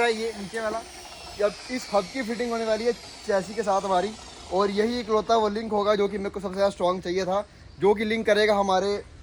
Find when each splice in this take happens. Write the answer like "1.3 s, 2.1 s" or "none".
none